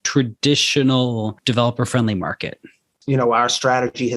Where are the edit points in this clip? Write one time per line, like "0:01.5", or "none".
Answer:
0:02.9

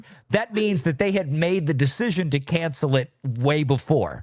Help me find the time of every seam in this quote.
none

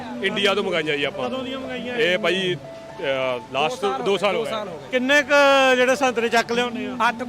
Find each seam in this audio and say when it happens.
0:04.8

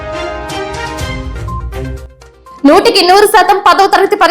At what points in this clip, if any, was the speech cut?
0:01.9

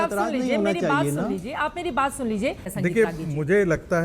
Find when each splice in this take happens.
0:02.7

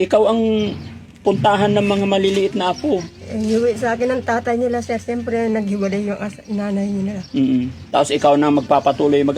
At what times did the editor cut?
none

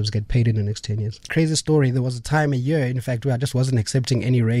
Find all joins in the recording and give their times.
0:01.3

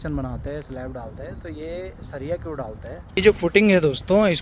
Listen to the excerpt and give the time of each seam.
0:03.0

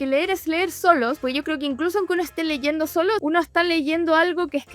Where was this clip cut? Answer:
0:03.2

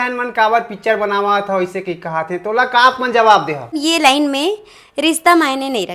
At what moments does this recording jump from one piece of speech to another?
0:03.8

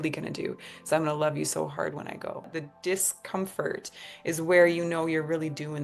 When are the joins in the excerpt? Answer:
0:02.6

